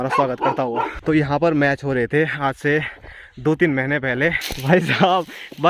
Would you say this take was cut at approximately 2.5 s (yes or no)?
no